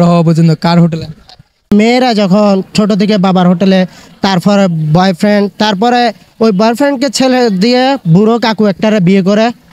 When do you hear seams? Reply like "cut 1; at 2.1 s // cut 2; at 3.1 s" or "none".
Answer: cut 1; at 1.7 s